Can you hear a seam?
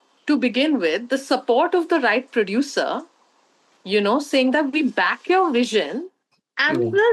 no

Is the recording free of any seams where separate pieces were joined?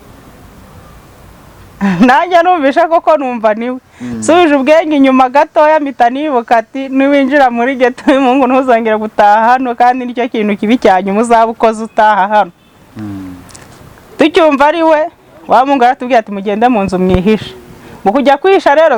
yes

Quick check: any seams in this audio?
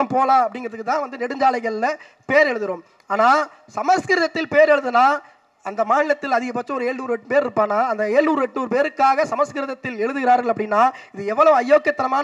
no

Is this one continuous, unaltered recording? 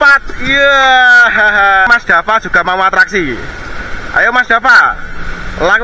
no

